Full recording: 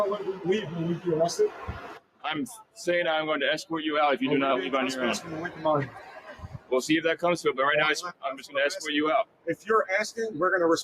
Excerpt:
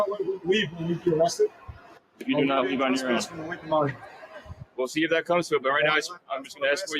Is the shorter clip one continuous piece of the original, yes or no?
no